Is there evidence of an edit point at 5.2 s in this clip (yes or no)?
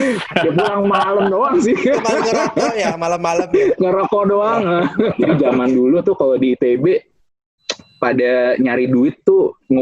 yes